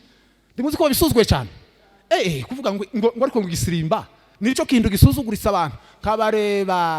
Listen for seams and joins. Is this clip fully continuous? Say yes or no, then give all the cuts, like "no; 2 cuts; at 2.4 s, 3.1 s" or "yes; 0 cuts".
yes; 0 cuts